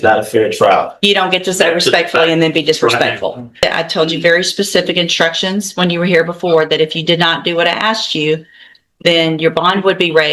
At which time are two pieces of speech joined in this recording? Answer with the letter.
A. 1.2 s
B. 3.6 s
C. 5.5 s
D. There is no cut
B